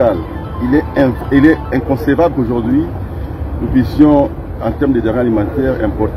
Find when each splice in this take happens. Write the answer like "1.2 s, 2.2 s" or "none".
none